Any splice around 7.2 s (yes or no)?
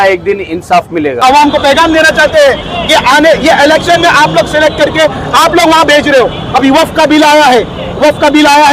no